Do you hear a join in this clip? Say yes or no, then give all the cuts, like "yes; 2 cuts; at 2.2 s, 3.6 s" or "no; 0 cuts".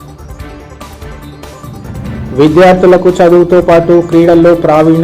no; 0 cuts